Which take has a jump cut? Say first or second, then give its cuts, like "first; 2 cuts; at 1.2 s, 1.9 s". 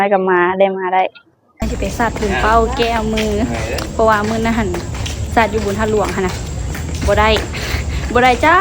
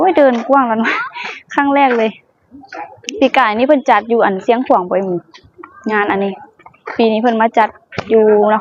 first; 1 cut; at 1.6 s